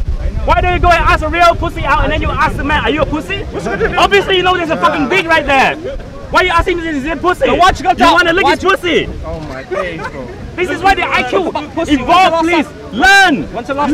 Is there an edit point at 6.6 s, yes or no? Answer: no